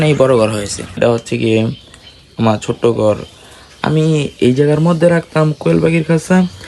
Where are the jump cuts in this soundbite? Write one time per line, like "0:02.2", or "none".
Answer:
0:01.0